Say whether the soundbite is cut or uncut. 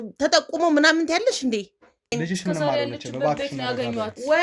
cut